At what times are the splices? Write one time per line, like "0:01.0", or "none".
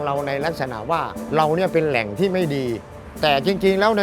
0:01.2
0:03.0